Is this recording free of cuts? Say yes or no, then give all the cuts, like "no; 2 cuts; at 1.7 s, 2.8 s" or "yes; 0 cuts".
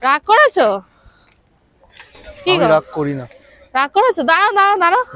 yes; 0 cuts